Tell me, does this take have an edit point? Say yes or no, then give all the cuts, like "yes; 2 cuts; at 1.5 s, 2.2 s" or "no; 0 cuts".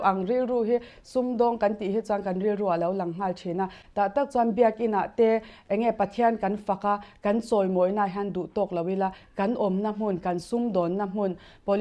no; 0 cuts